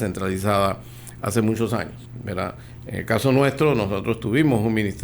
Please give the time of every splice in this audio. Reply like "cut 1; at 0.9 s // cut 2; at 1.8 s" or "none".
cut 1; at 2.4 s